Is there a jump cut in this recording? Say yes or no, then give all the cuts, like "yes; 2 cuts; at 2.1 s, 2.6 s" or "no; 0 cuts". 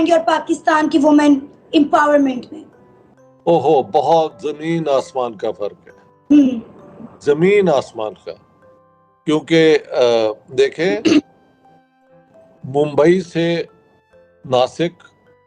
no; 0 cuts